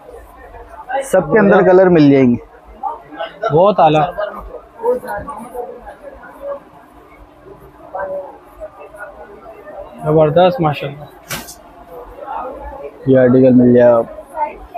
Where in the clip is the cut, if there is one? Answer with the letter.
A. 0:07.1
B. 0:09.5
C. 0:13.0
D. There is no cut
C